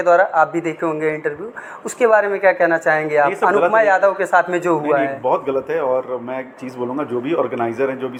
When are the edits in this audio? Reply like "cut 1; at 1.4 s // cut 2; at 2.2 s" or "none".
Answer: none